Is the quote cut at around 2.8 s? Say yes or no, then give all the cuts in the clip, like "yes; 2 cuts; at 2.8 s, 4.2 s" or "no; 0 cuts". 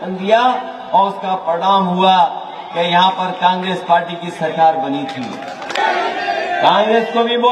no; 1 cut; at 5.8 s